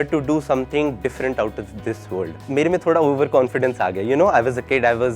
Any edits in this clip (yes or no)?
yes